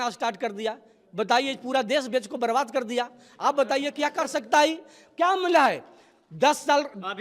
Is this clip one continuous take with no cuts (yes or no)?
yes